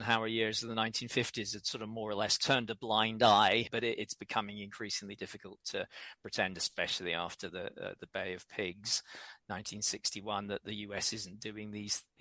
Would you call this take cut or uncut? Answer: cut